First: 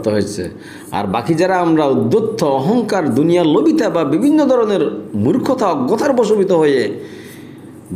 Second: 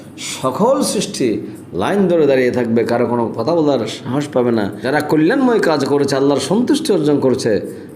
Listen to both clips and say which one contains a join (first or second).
second